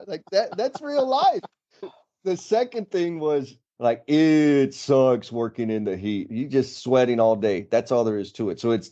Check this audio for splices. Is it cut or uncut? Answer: cut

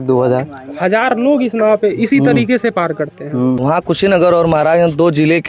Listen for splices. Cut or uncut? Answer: cut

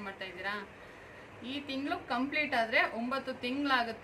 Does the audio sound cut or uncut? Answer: uncut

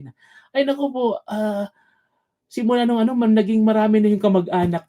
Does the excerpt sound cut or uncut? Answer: uncut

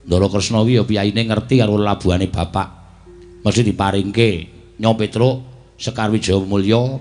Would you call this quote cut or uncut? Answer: uncut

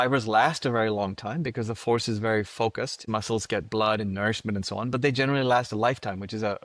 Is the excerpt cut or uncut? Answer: cut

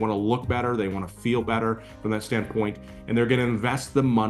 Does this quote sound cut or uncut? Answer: uncut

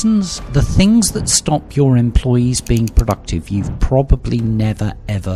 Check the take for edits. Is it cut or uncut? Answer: uncut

